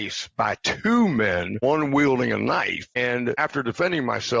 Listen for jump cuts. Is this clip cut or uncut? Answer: cut